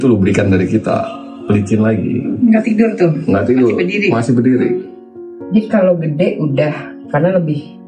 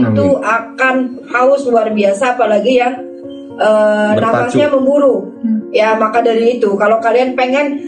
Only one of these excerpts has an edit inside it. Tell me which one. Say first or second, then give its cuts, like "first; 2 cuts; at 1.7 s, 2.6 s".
first; 1 cut; at 5.2 s